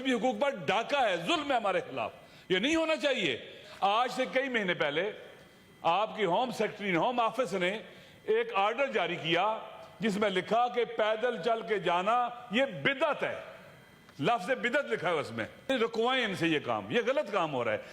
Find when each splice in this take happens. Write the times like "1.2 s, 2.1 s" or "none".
3.6 s, 15.7 s